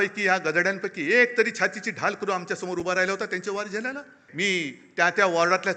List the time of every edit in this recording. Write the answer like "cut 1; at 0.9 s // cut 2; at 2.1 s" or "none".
cut 1; at 4.2 s